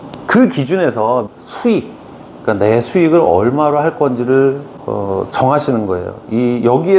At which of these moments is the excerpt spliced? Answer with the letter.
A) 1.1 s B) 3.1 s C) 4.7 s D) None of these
C